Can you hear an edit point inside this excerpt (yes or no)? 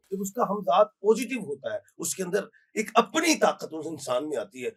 no